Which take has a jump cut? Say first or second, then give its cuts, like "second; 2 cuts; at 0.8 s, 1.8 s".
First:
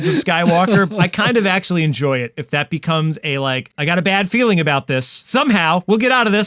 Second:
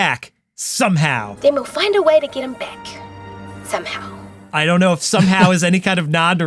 first; 3 cuts; at 0.9 s, 3.7 s, 5.2 s